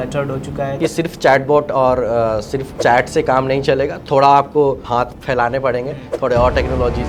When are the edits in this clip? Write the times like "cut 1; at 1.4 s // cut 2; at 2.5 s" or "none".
cut 1; at 0.8 s // cut 2; at 2.6 s // cut 3; at 4.8 s